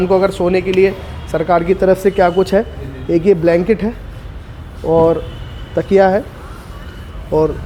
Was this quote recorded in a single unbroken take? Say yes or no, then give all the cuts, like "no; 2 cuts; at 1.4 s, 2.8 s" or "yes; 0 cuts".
yes; 0 cuts